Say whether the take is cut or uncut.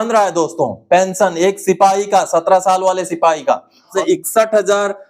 cut